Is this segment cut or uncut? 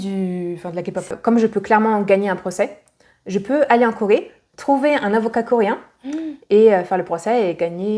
cut